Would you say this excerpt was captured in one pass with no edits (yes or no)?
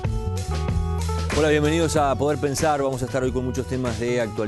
no